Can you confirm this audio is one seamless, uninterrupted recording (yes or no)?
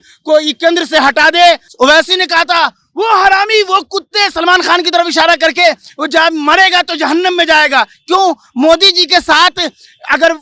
no